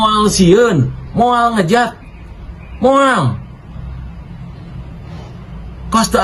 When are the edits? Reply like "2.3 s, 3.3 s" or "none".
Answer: none